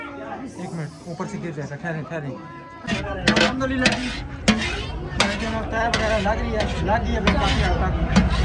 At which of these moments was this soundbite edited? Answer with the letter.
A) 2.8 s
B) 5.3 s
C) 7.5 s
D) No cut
A